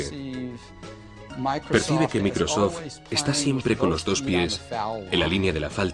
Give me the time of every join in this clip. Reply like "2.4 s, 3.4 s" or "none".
none